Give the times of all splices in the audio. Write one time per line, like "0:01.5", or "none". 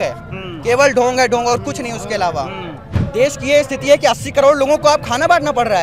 0:03.0